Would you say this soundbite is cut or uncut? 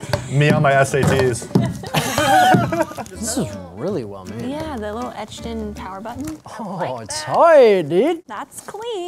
uncut